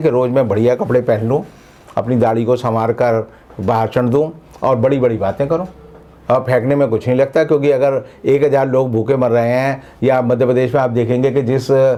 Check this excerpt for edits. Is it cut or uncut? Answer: uncut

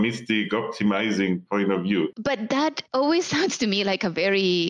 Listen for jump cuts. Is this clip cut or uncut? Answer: cut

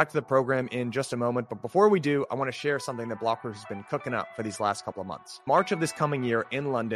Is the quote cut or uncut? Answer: uncut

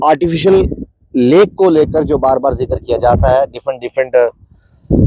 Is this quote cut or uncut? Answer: uncut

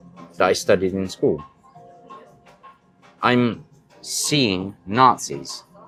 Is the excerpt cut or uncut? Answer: uncut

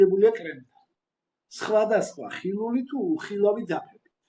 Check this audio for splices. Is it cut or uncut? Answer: uncut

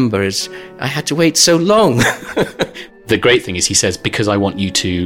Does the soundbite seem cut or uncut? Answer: cut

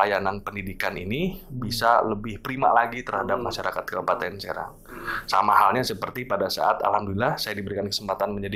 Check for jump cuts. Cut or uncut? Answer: uncut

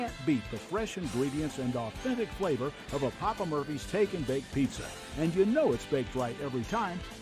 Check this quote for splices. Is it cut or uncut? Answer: uncut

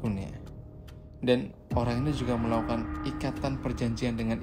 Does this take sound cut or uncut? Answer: uncut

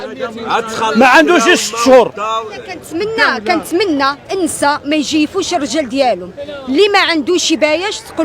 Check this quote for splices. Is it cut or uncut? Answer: cut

